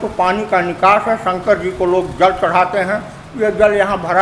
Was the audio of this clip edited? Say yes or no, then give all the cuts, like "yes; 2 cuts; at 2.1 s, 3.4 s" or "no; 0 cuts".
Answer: no; 0 cuts